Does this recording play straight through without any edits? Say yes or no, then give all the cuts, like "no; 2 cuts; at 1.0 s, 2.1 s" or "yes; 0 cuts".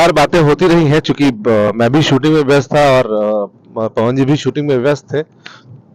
yes; 0 cuts